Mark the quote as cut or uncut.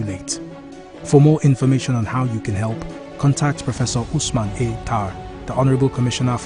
uncut